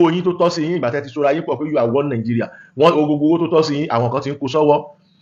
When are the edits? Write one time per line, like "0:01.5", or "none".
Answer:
none